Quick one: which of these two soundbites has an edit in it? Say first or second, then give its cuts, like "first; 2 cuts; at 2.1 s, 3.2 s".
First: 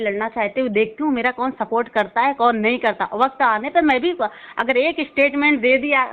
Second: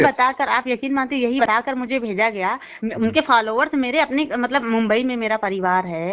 second; 1 cut; at 1.4 s